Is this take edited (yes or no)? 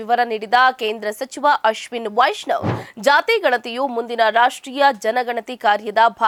no